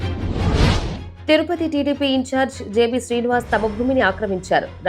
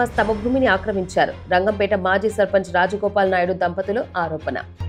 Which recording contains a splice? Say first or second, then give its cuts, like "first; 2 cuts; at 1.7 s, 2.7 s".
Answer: first; 1 cut; at 1.1 s